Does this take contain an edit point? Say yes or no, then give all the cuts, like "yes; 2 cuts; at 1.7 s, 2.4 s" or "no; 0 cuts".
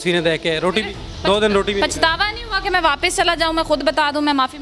no; 0 cuts